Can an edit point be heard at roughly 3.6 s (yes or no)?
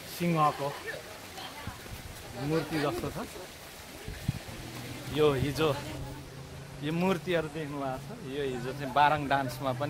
no